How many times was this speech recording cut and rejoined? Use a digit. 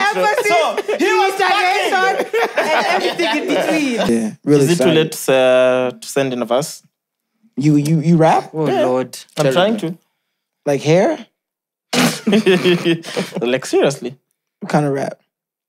1